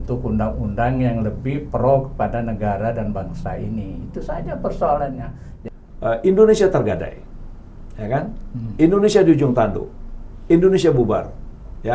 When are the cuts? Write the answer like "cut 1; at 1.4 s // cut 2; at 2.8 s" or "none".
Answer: cut 1; at 5.5 s